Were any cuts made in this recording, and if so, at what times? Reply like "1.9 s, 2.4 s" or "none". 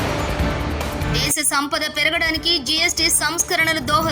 none